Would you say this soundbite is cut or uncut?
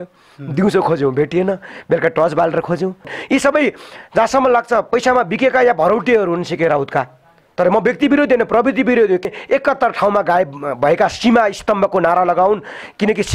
cut